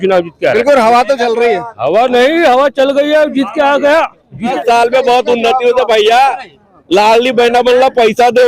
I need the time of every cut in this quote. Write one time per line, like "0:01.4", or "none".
0:04.5